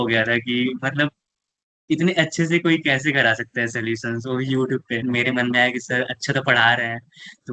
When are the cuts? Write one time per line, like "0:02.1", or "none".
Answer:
0:05.0

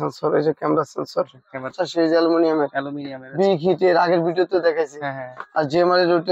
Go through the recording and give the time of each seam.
0:01.7

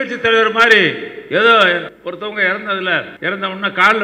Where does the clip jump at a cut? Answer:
0:01.9
0:03.1

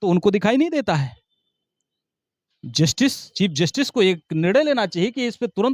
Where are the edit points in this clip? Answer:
none

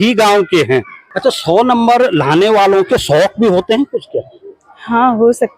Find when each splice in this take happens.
0:01.0

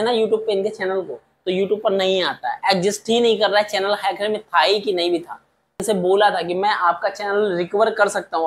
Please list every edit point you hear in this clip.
0:05.8

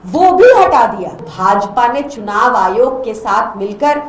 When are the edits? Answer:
0:01.3

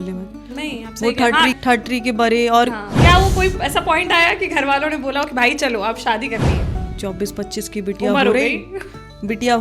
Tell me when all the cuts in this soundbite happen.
0:01.5
0:02.9
0:06.8

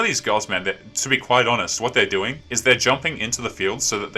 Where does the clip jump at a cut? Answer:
none

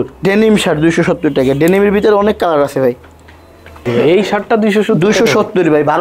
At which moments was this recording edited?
0:03.8

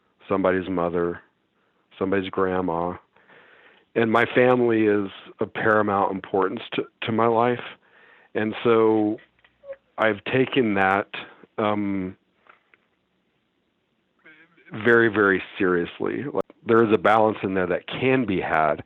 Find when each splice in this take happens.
0:16.5

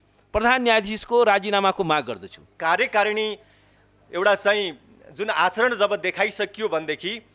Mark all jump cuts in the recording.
0:02.5

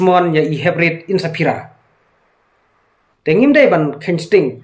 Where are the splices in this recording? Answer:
0:03.1

